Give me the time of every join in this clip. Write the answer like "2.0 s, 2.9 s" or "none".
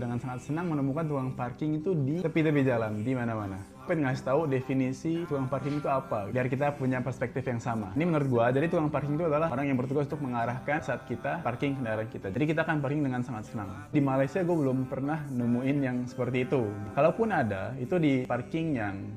none